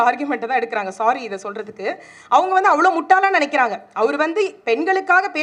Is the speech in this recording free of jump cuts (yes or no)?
yes